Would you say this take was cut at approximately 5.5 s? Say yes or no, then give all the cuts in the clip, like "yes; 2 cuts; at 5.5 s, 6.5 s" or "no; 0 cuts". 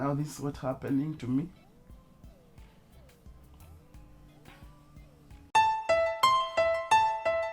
yes; 1 cut; at 5.5 s